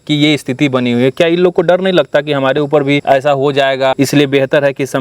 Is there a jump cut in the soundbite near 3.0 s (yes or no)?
yes